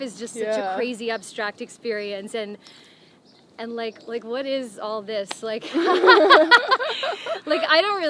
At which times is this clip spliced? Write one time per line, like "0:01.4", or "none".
none